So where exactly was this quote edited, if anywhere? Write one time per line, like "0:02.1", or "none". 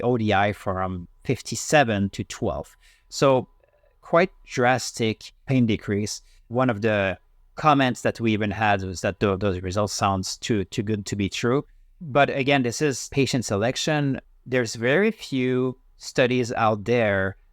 0:13.0
0:14.3